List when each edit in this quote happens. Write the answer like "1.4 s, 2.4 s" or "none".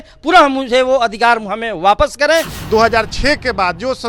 2.5 s